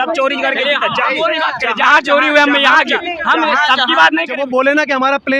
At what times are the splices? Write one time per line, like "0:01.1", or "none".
0:04.3